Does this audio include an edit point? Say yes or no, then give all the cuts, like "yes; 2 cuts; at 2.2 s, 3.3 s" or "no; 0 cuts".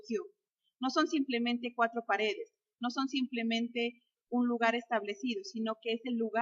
yes; 1 cut; at 3.3 s